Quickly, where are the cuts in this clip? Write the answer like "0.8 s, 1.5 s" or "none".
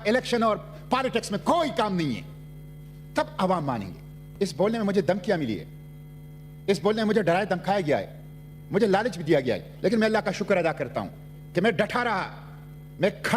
4.2 s